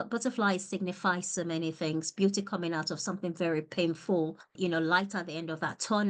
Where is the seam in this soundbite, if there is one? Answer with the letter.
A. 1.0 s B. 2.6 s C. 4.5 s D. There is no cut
C